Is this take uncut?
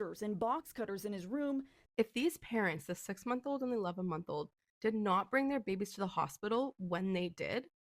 no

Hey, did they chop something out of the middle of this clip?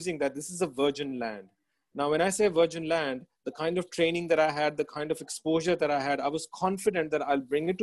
no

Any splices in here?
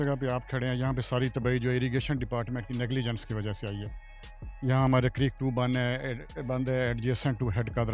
no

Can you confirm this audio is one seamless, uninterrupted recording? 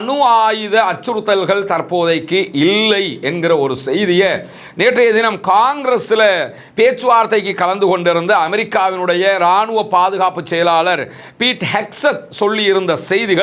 yes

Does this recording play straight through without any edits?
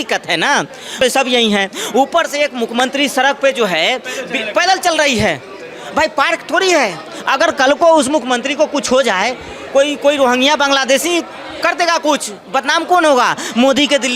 no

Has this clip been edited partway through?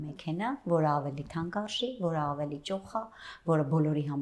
no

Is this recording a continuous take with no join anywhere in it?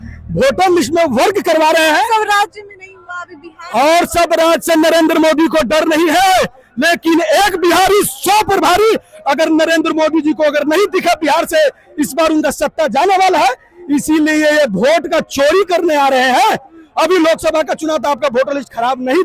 yes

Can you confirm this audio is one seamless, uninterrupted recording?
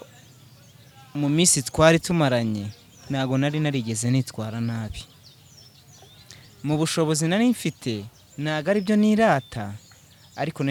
yes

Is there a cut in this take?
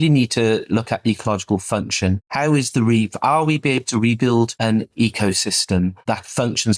yes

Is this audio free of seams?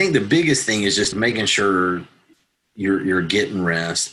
no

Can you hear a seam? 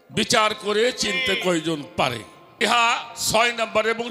yes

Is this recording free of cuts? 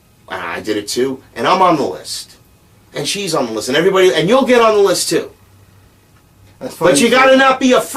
no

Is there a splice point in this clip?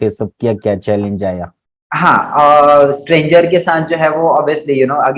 no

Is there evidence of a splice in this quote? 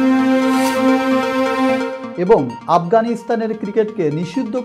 yes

